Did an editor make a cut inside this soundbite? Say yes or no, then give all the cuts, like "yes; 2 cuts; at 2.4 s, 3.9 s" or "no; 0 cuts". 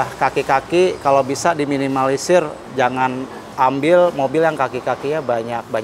no; 0 cuts